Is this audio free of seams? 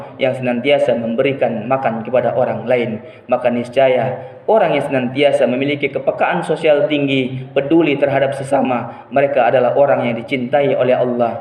yes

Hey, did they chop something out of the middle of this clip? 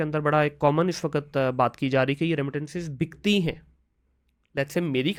no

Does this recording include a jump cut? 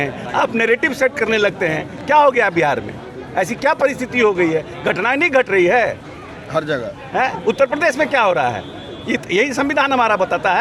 no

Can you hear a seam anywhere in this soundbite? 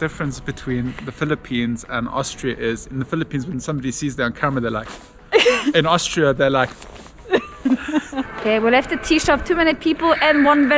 yes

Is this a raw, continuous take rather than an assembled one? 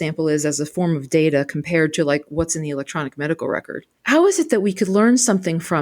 no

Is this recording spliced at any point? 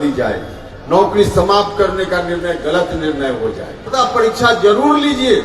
yes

